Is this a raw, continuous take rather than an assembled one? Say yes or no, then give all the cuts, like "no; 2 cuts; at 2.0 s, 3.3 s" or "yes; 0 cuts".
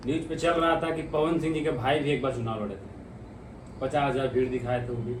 yes; 0 cuts